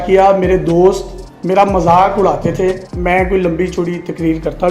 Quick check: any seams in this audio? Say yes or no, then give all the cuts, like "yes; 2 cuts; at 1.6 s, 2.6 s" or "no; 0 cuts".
yes; 1 cut; at 2.9 s